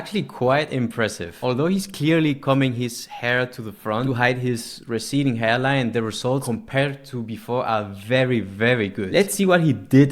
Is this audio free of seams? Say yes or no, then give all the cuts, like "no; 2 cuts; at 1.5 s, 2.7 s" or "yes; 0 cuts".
no; 4 cuts; at 1.3 s, 4.0 s, 6.4 s, 9.0 s